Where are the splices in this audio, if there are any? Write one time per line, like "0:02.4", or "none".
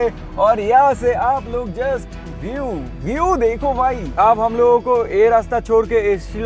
0:04.1